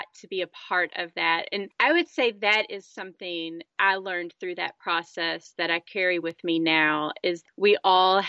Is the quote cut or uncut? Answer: cut